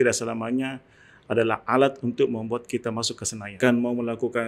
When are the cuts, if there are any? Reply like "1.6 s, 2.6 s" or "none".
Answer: 3.6 s